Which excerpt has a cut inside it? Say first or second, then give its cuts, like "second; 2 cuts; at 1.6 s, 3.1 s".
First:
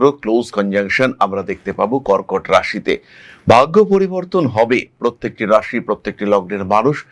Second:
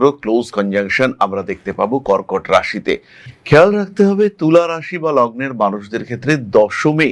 second; 1 cut; at 3.3 s